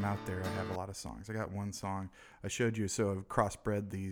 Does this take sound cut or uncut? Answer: cut